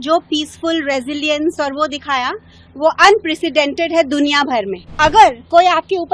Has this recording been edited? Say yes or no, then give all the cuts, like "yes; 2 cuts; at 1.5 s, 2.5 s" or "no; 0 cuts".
yes; 1 cut; at 4.9 s